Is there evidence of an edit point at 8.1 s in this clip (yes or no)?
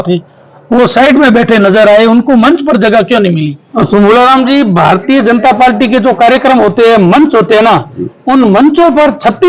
no